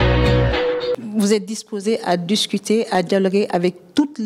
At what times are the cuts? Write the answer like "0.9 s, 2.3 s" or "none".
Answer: 0.9 s

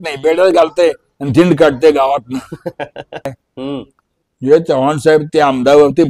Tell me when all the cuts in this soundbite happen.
3.3 s

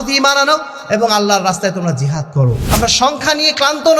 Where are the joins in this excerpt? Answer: 2.6 s

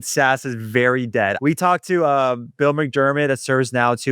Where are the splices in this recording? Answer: 1.4 s

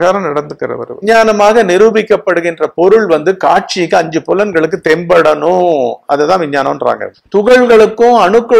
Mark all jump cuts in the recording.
0.9 s, 7.1 s

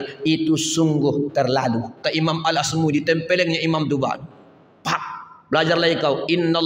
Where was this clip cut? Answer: 2.0 s

